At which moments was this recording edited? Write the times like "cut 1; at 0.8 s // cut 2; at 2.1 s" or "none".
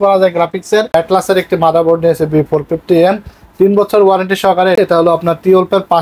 cut 1; at 0.9 s // cut 2; at 4.8 s